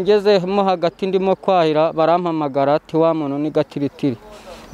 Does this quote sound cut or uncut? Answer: uncut